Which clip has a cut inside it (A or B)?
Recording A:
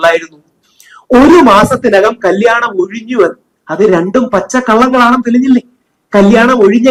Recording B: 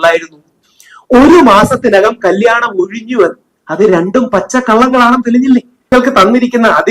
B